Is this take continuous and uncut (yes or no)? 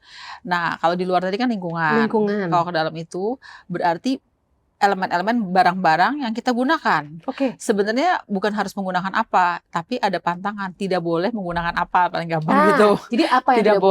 yes